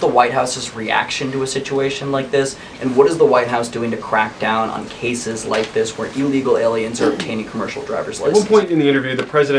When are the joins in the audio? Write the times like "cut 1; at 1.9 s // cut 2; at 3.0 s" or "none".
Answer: cut 1; at 8.2 s

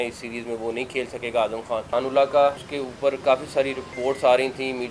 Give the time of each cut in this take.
cut 1; at 1.9 s // cut 2; at 2.7 s // cut 3; at 3.9 s

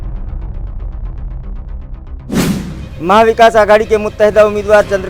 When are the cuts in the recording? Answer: cut 1; at 2.8 s

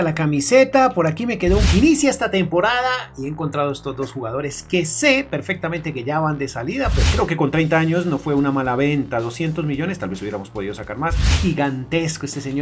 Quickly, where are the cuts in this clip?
cut 1; at 1.7 s // cut 2; at 7.0 s // cut 3; at 11.3 s

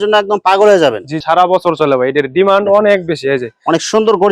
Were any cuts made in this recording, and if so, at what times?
cut 1; at 1.2 s

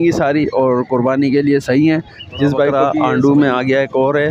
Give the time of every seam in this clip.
cut 1; at 2.7 s

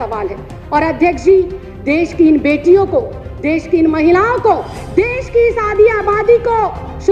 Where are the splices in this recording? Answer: none

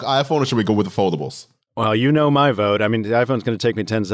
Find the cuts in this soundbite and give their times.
cut 1; at 2.0 s

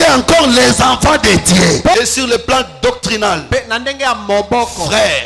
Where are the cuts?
cut 1; at 1.9 s

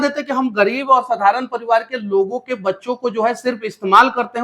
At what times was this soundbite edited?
none

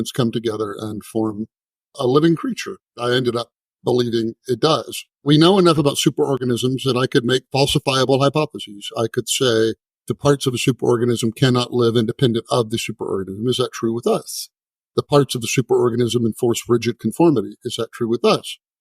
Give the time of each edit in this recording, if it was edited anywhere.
cut 1; at 3.0 s // cut 2; at 5.2 s

